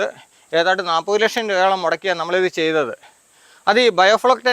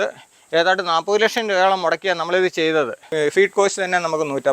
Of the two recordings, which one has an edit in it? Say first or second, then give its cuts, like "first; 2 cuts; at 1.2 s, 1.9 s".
second; 1 cut; at 3.1 s